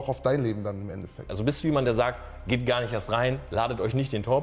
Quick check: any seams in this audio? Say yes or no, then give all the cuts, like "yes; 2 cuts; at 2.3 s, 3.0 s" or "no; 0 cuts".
yes; 1 cut; at 1.2 s